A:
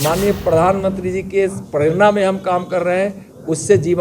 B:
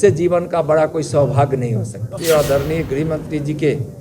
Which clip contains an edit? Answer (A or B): B